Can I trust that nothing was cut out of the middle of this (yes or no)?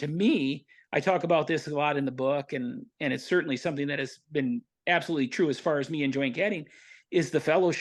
no